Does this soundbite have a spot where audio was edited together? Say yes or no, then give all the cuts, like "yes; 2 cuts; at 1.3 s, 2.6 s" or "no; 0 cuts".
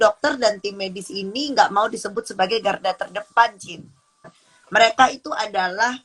yes; 1 cut; at 4.2 s